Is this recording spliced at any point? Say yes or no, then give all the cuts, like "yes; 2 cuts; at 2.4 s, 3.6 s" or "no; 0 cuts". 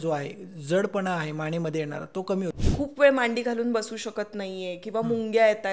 yes; 1 cut; at 2.5 s